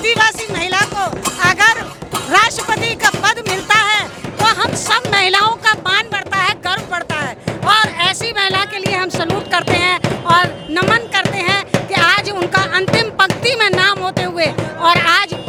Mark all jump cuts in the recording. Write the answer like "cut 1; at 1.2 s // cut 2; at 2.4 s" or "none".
none